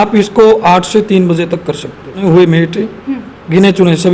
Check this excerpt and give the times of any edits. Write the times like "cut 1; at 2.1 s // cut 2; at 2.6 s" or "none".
cut 1; at 2.2 s